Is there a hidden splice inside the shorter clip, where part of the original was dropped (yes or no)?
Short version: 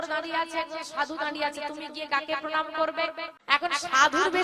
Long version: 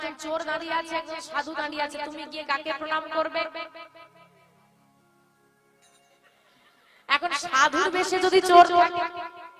yes